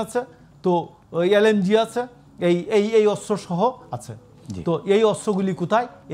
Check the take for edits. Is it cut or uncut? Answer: uncut